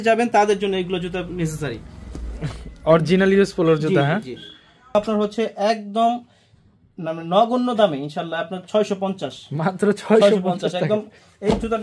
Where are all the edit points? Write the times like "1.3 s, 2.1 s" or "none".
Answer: 4.9 s